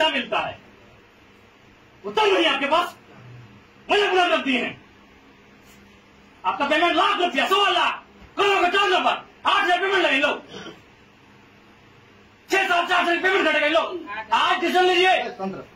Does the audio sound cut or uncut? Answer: uncut